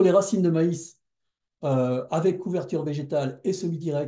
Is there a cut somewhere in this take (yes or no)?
no